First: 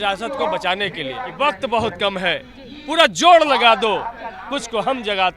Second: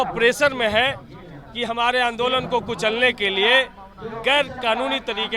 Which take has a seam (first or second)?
first